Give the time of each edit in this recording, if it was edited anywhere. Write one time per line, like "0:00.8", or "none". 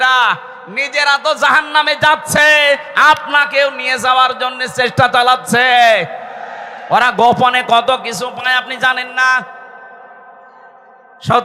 none